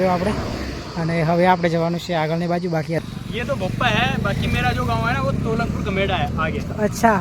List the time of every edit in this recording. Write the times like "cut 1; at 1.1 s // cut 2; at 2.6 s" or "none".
cut 1; at 3.0 s